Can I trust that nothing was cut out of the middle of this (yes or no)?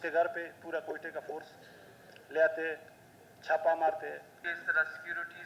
no